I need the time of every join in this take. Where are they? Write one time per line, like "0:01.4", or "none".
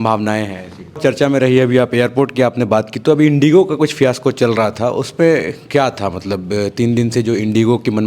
0:01.0